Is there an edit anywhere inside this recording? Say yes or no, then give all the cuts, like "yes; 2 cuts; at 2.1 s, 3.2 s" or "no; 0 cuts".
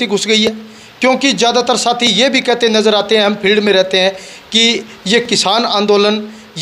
no; 0 cuts